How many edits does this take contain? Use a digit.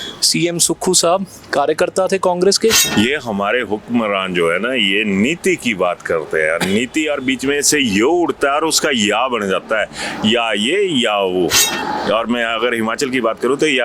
1